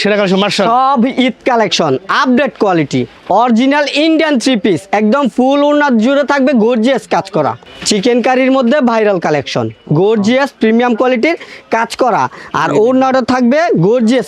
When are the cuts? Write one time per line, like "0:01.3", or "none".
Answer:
0:03.1
0:07.6